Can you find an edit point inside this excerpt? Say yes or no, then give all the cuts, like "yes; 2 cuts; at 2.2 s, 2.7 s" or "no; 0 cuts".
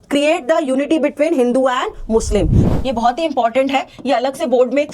yes; 1 cut; at 2.6 s